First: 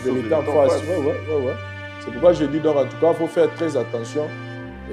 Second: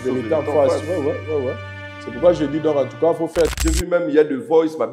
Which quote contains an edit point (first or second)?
second